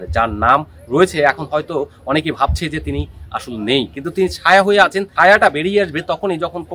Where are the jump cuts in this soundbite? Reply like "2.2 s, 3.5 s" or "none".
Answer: 5.1 s